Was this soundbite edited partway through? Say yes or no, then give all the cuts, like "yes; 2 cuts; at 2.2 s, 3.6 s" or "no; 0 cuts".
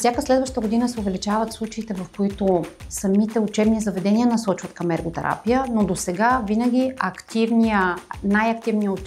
no; 0 cuts